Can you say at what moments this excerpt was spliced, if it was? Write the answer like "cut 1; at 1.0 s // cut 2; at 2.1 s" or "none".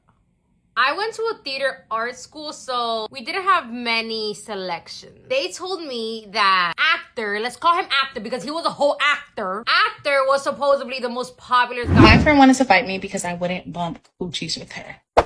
cut 1; at 12.0 s